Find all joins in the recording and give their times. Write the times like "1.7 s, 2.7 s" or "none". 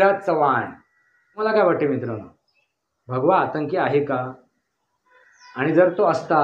1.4 s